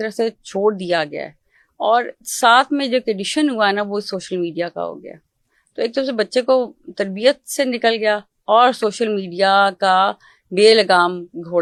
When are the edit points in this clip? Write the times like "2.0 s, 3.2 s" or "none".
none